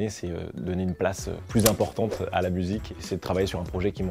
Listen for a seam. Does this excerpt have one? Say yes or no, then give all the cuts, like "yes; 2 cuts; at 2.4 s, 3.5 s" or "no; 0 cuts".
yes; 1 cut; at 2.9 s